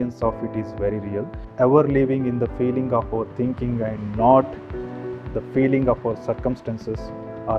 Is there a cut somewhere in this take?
yes; 1 cut; at 1.4 s

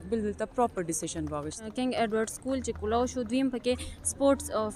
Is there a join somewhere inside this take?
yes; 1 cut; at 1.7 s

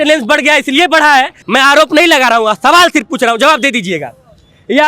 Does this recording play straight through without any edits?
no; 1 cut; at 1.4 s

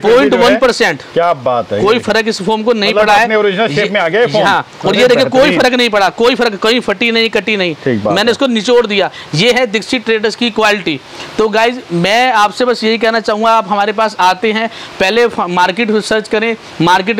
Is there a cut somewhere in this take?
no; 0 cuts

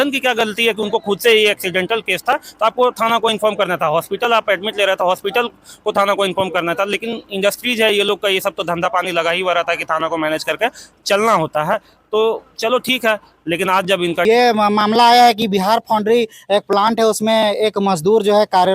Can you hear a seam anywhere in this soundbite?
yes; 1 cut; at 14.2 s

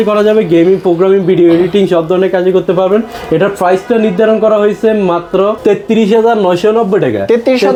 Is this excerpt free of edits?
yes; 0 cuts

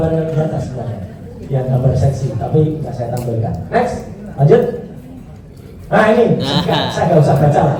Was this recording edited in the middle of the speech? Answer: no; 0 cuts

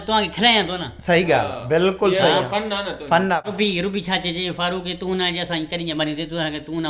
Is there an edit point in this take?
yes; 1 cut; at 3.5 s

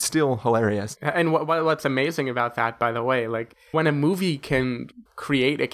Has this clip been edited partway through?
yes; 2 cuts; at 1.0 s, 3.7 s

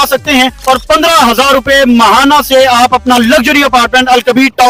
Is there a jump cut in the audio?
no; 0 cuts

